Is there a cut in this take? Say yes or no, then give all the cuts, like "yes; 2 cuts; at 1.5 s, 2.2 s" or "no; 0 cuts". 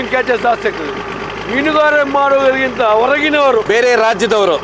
yes; 1 cut; at 3.7 s